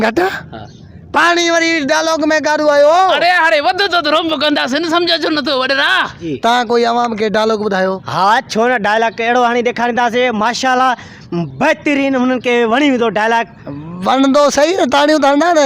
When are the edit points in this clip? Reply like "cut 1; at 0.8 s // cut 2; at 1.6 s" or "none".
cut 1; at 6.2 s